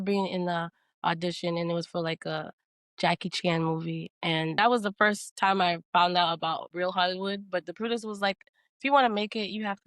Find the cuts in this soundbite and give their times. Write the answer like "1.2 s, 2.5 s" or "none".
4.5 s